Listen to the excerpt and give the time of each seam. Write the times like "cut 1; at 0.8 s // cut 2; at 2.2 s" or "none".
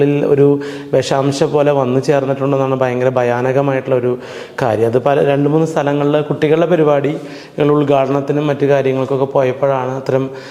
none